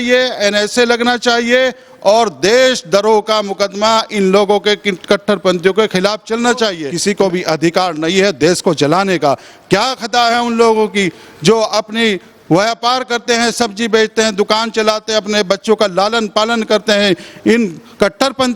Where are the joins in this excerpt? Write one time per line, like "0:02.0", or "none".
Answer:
0:06.9